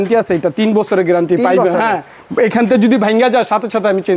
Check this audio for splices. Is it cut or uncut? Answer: uncut